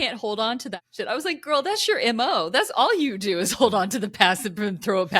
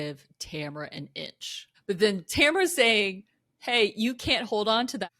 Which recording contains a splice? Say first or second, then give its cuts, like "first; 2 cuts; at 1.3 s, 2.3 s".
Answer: second; 1 cut; at 1.7 s